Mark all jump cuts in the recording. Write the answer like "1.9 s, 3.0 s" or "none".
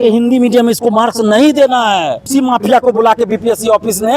2.3 s